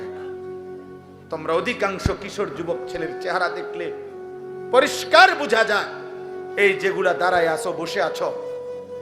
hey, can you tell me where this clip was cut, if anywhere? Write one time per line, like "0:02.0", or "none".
0:01.0

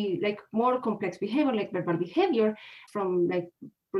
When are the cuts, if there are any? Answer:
0:02.8

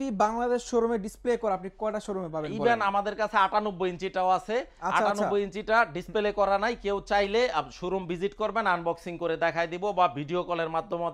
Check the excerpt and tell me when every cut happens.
none

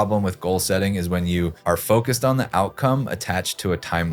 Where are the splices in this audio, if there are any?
0:01.6

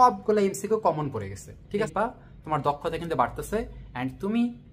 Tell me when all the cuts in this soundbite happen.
0:01.9

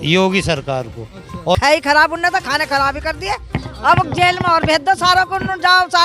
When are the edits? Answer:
0:01.5

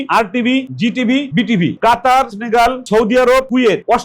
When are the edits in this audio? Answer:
0:01.7

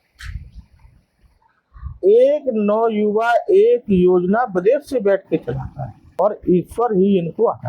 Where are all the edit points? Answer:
0:06.0

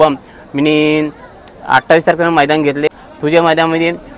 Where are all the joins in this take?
0:02.9

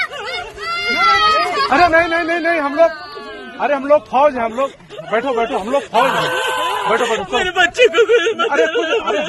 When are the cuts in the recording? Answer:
none

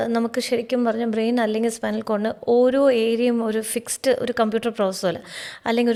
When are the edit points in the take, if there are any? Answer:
none

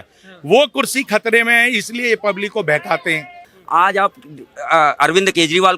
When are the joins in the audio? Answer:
0:03.5

